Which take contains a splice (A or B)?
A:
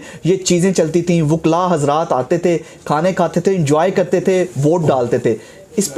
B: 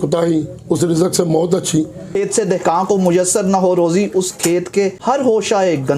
B